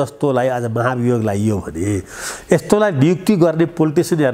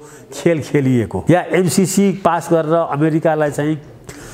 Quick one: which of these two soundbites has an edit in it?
second; 1 cut; at 1.2 s

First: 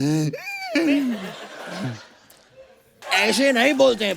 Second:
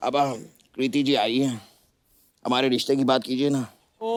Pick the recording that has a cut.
first; 1 cut; at 3.0 s

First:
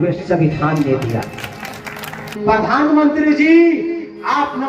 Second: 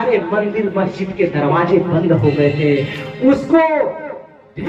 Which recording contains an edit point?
first; 1 cut; at 2.3 s

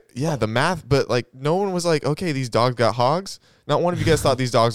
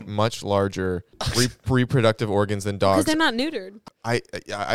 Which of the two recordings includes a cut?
second; 2 cuts; at 1.2 s, 3.8 s

